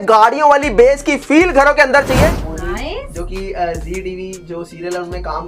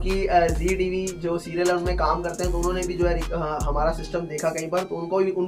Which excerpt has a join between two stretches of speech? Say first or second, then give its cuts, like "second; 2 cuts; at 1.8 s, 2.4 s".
first; 1 cut; at 2.3 s